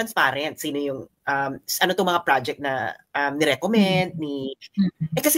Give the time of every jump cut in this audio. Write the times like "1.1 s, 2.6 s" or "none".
none